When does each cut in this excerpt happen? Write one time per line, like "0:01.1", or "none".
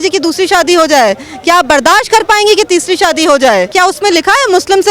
0:03.7